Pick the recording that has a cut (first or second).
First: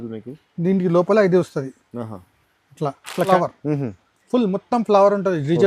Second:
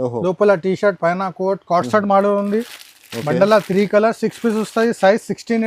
first